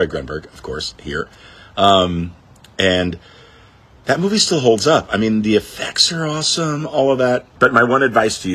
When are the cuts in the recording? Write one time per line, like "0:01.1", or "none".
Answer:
0:07.5

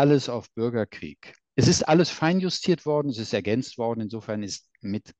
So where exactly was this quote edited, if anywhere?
0:01.4

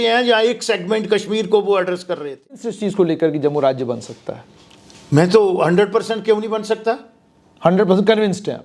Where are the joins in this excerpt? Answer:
0:02.7

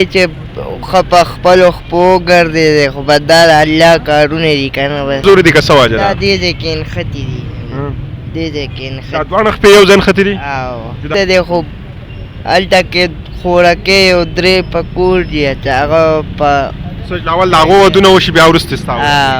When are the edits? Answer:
0:05.2
0:11.1

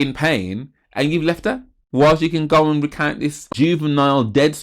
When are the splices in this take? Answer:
0:01.7
0:03.5

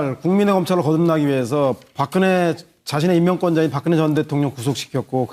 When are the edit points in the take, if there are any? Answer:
none

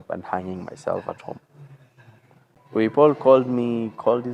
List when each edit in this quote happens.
0:02.5

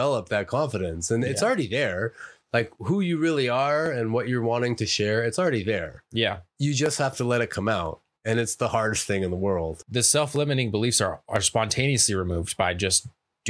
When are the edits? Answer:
0:09.8

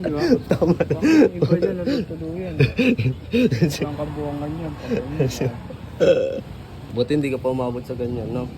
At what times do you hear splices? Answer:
0:06.9

